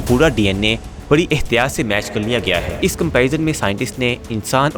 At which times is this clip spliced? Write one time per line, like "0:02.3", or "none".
0:02.7